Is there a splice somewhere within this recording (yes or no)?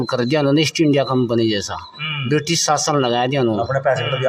no